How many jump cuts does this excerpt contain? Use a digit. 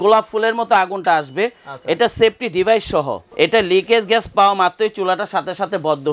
1